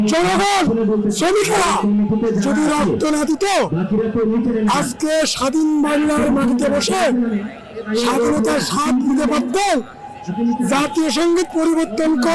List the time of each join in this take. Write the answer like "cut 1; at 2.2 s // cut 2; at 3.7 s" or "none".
none